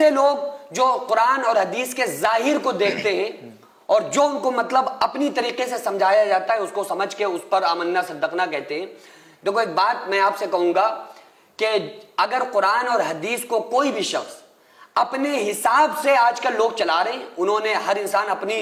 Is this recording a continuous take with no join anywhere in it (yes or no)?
yes